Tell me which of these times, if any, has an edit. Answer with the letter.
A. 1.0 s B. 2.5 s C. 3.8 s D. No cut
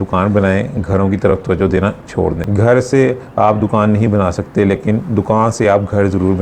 B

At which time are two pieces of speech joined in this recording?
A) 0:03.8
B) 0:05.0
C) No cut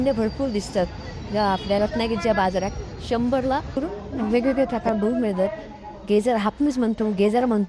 A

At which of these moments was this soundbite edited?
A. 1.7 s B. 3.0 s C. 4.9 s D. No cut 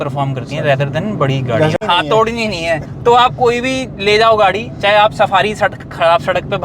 A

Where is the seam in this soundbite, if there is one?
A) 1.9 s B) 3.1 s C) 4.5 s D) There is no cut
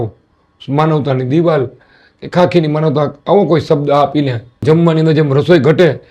C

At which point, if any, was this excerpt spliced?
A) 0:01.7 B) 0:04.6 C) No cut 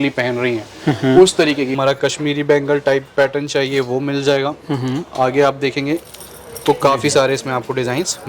A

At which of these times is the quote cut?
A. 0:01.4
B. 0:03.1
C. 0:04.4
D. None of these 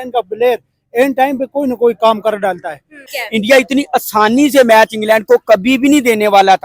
B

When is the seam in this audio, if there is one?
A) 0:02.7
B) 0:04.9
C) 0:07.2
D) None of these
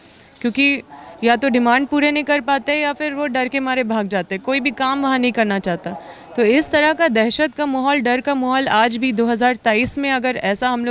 D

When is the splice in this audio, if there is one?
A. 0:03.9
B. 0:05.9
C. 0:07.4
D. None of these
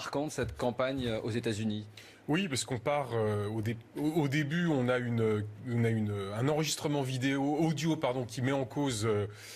C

